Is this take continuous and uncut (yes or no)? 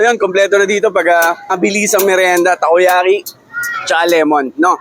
no